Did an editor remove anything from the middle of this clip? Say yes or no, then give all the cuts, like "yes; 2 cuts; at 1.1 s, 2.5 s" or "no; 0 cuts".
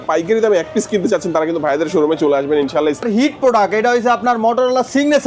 yes; 1 cut; at 3.0 s